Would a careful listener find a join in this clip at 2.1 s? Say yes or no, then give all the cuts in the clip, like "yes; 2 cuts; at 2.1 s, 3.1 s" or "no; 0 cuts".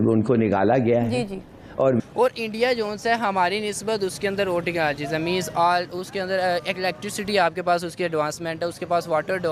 yes; 1 cut; at 2.1 s